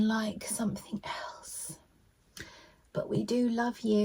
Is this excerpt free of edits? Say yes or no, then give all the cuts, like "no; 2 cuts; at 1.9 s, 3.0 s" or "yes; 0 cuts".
yes; 0 cuts